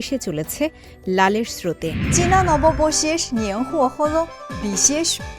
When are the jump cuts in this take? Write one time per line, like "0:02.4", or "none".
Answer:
0:02.0